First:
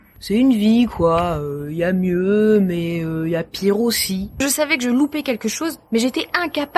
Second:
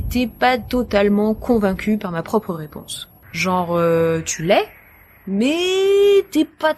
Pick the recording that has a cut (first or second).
first